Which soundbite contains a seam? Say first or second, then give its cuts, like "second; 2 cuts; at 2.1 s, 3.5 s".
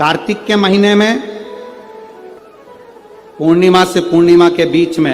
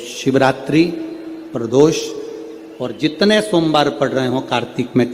first; 1 cut; at 2.4 s